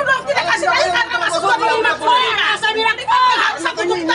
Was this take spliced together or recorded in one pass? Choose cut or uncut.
uncut